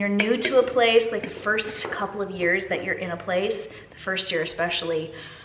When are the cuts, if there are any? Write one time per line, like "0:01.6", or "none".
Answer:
none